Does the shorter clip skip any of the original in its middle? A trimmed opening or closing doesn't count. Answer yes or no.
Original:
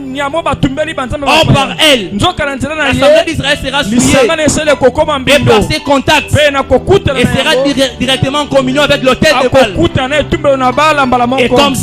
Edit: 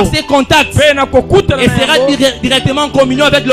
no